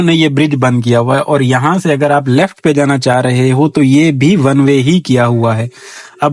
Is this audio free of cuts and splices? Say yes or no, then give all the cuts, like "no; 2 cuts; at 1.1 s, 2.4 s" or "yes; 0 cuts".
yes; 0 cuts